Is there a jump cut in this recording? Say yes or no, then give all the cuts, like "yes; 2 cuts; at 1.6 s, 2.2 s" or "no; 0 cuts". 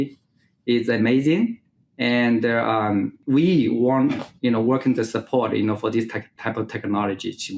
yes; 2 cuts; at 3.2 s, 6.3 s